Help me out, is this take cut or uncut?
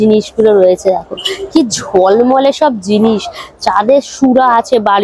uncut